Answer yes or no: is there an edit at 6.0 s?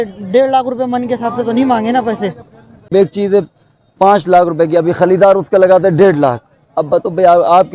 no